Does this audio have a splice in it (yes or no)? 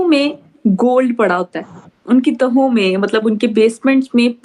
no